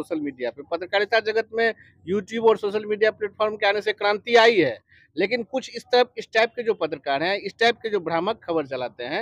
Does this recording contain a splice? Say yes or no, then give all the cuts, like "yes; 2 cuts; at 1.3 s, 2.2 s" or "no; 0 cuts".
no; 0 cuts